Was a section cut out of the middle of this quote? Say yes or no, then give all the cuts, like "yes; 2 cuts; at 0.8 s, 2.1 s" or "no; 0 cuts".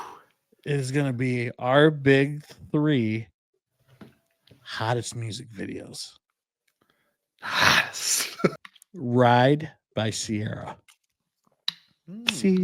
yes; 1 cut; at 8.5 s